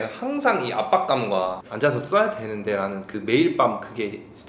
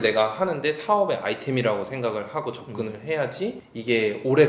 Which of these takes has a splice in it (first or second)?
first